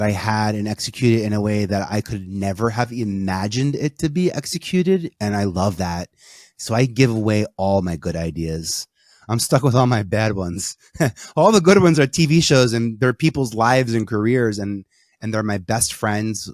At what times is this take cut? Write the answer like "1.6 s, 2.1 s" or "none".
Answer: none